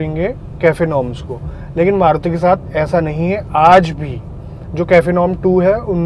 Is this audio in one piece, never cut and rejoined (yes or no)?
yes